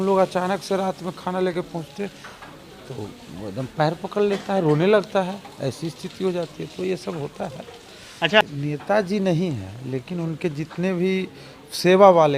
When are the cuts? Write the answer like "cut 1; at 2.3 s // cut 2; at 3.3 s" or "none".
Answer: cut 1; at 8.4 s